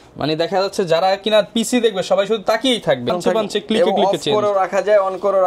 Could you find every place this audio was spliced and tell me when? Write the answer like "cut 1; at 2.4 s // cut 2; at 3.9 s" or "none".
cut 1; at 3.1 s